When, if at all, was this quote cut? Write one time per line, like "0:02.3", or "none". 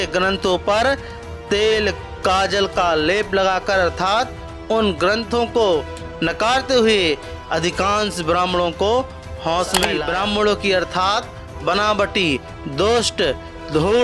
0:02.1
0:10.0